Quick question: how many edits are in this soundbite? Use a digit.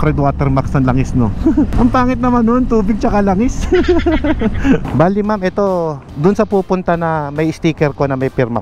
1